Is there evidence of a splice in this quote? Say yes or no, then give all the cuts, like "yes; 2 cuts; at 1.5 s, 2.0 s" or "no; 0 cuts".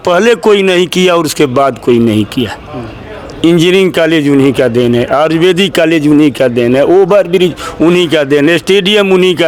no; 0 cuts